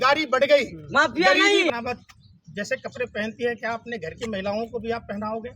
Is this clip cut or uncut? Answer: cut